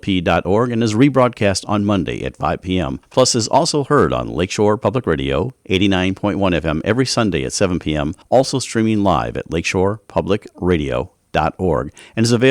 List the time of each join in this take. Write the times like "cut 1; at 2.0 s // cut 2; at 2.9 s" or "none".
cut 1; at 3.0 s // cut 2; at 8.2 s